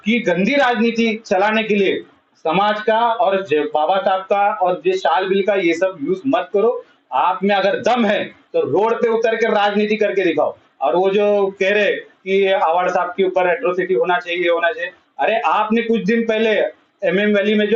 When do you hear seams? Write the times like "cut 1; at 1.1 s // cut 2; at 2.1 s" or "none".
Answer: none